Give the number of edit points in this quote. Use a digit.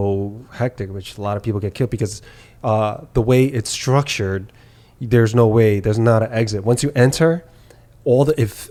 0